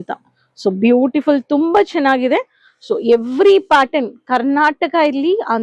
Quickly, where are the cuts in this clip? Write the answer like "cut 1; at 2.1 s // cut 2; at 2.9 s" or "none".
none

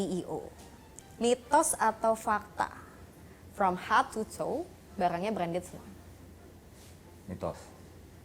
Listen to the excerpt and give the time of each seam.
none

